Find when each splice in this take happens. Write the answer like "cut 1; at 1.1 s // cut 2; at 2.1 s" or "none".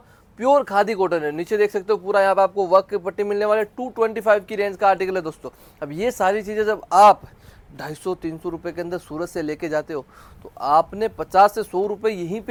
none